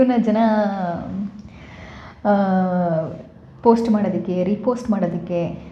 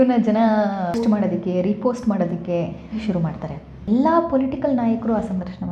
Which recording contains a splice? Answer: second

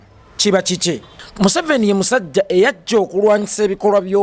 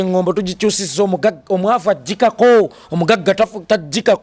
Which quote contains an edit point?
first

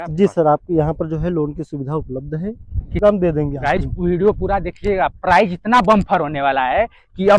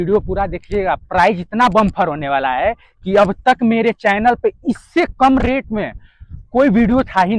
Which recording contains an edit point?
first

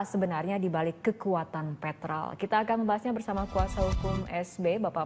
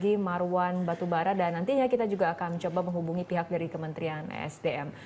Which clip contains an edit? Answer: second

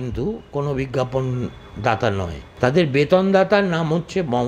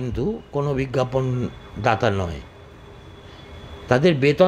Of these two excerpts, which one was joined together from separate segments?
first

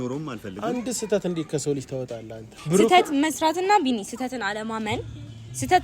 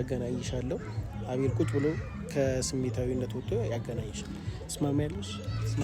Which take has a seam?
first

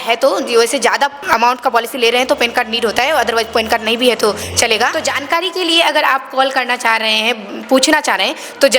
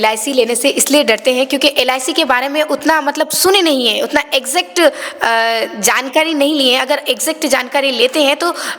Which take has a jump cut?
first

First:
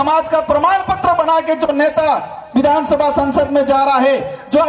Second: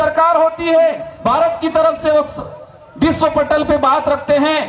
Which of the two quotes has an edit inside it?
second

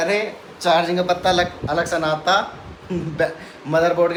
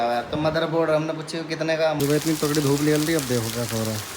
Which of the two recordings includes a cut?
second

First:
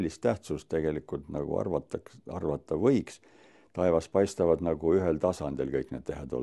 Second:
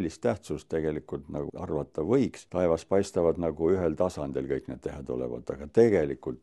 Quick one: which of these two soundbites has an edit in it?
second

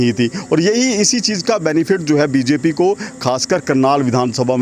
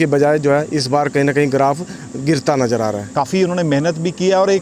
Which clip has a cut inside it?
second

